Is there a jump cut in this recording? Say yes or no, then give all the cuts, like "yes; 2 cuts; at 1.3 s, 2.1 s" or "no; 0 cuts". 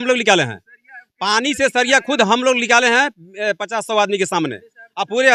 no; 0 cuts